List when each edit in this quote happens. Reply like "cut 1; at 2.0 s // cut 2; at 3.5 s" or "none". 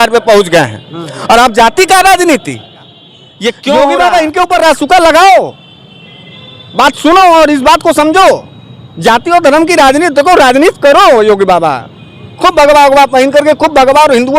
cut 1; at 4.0 s